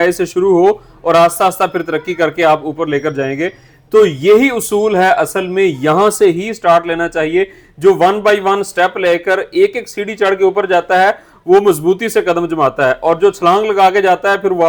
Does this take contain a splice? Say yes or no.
no